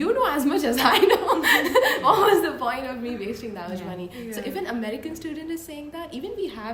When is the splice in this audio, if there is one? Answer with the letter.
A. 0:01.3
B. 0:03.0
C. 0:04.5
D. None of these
D